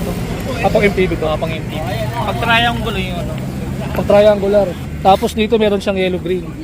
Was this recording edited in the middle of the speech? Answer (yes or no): yes